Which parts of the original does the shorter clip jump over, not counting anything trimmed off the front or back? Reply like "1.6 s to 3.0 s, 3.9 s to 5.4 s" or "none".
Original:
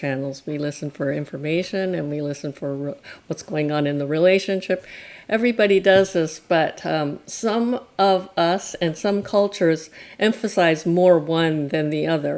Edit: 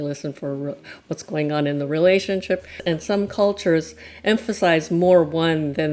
4.9 s to 8.7 s